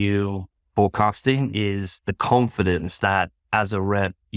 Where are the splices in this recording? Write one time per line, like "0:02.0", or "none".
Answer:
none